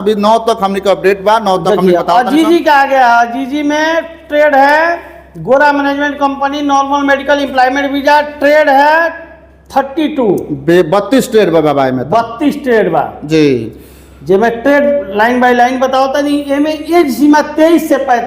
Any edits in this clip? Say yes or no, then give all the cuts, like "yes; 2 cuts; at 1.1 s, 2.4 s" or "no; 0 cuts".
no; 0 cuts